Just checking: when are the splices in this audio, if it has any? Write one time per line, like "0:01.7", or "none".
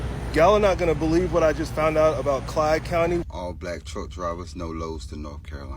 0:03.2

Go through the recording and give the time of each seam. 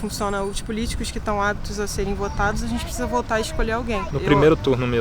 0:04.1

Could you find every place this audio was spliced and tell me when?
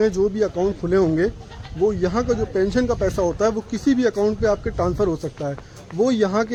none

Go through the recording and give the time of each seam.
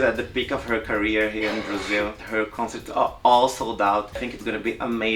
0:02.2
0:04.2

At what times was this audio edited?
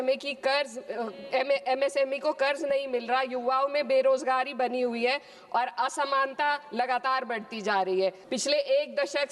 0:08.2

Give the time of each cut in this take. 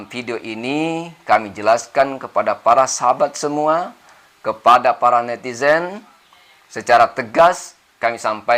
none

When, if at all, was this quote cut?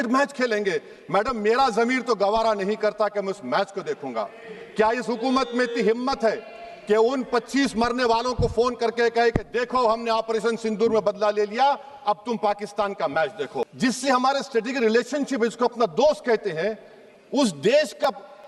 0:13.7

